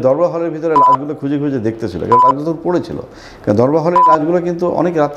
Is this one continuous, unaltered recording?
yes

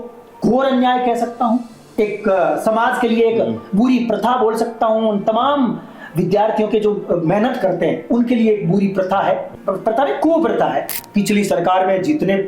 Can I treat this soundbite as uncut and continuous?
no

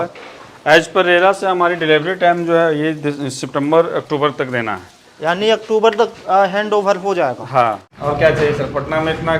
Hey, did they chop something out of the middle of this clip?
yes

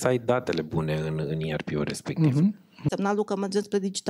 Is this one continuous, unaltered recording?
no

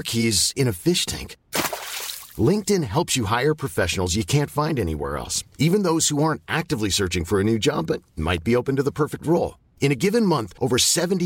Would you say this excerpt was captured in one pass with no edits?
yes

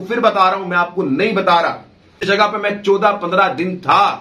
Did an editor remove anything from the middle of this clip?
yes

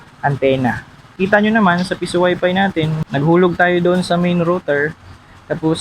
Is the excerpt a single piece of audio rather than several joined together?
no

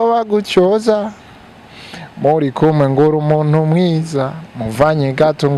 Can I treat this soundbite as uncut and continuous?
yes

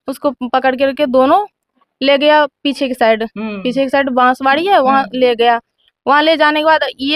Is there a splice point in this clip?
no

